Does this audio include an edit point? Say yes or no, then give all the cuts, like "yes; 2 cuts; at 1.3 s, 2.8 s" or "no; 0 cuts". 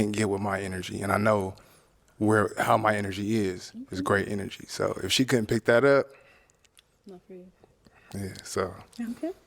no; 0 cuts